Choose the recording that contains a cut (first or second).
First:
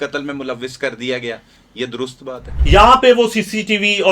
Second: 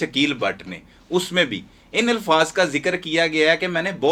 first